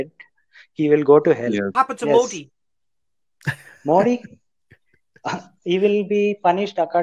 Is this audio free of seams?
no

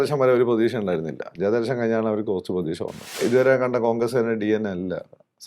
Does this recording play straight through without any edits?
no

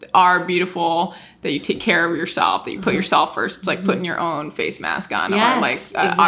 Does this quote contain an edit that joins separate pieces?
no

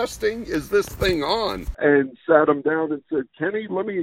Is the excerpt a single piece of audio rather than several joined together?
no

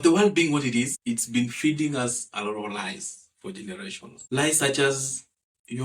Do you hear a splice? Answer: yes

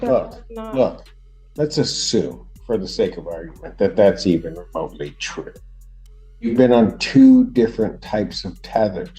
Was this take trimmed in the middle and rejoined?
no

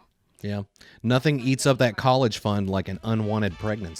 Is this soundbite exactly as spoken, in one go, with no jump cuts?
yes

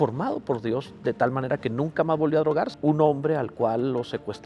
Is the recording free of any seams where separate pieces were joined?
no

